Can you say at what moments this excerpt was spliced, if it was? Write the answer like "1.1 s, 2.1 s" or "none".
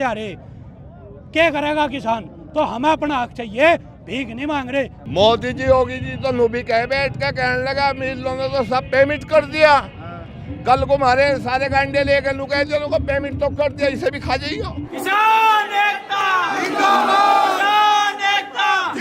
5.0 s, 15.0 s